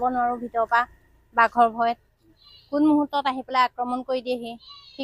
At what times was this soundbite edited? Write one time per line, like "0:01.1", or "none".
none